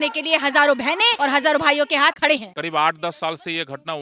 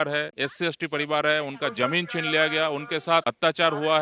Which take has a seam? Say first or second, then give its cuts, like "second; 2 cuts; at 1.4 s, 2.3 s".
first; 2 cuts; at 1.1 s, 2.2 s